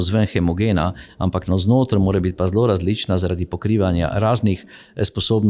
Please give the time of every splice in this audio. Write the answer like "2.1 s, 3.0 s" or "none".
none